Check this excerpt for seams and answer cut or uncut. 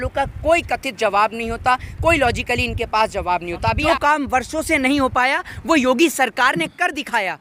cut